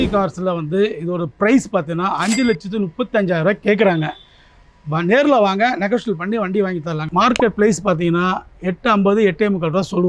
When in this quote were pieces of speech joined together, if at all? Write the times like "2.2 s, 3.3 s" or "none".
7.0 s